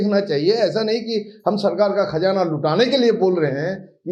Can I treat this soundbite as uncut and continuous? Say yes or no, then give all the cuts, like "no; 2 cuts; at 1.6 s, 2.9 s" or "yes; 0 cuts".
yes; 0 cuts